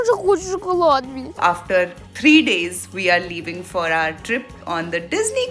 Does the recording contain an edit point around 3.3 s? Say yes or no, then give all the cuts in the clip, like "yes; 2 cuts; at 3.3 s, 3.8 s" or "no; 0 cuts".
no; 2 cuts; at 1.4 s, 4.6 s